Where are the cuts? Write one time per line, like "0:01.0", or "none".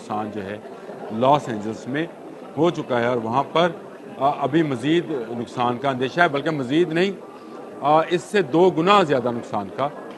none